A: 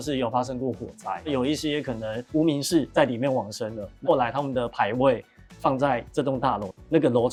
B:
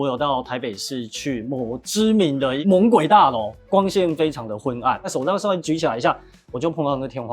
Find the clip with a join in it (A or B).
B